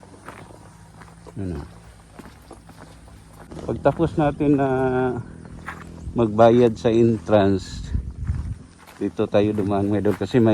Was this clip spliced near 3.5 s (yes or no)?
yes